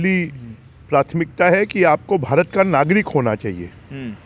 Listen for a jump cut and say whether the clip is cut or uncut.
uncut